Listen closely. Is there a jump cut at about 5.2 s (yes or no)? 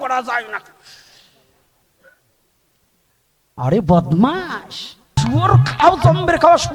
yes